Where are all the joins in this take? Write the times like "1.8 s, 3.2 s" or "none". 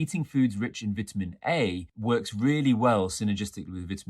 1.9 s